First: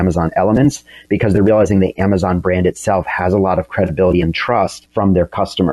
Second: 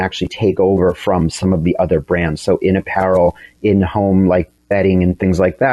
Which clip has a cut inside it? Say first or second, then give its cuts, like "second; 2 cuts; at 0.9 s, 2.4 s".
first; 1 cut; at 4.8 s